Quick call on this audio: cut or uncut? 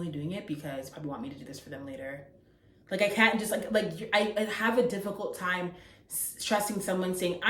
uncut